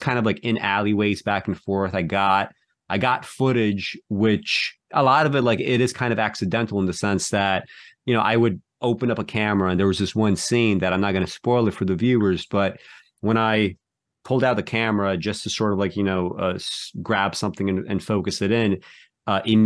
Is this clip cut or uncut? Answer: uncut